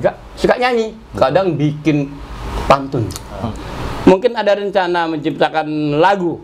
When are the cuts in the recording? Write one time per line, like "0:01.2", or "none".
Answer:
0:03.2